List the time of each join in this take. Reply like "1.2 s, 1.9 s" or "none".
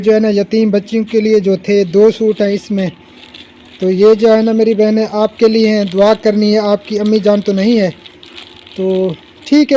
none